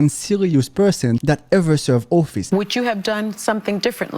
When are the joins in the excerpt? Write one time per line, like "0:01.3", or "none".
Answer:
0:01.2
0:02.4